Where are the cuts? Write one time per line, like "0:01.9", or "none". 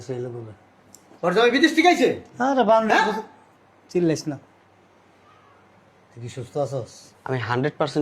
0:01.0
0:07.0